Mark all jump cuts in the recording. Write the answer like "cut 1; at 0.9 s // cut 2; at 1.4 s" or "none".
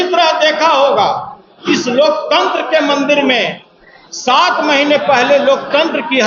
none